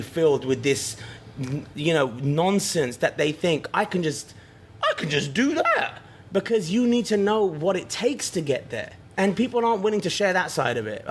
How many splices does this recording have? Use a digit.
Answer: 1